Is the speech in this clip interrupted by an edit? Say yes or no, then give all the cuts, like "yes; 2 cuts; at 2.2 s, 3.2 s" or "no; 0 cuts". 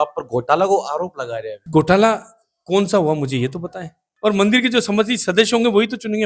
yes; 2 cuts; at 1.5 s, 4.0 s